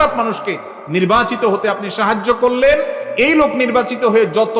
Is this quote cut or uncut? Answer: uncut